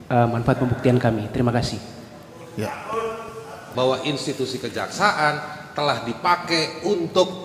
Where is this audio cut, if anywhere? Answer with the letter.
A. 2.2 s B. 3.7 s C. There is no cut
B